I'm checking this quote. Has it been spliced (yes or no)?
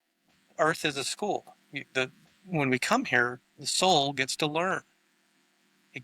no